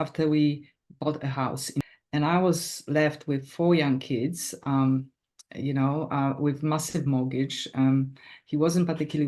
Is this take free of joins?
no; 1 cut; at 1.8 s

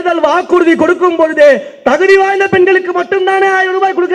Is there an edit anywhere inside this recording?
no; 0 cuts

